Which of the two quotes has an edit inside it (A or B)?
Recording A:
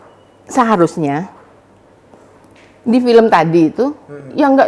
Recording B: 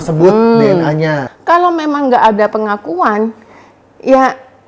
B